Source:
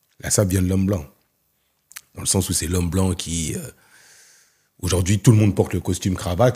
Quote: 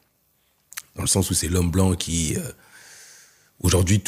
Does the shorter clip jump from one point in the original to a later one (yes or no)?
no